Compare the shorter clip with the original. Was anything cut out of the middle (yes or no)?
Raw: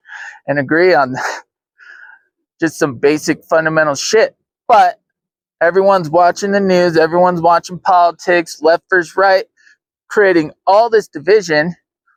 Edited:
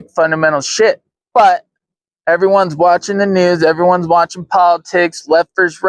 no